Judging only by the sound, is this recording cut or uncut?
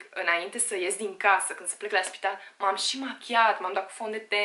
uncut